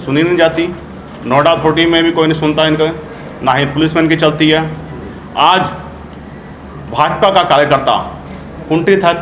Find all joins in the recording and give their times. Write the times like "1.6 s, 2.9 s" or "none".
none